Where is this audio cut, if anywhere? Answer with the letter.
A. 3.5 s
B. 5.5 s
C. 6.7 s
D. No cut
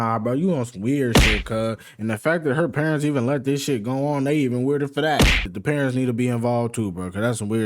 B